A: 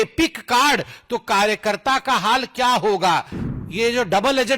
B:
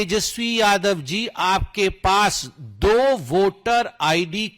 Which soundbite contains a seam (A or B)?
A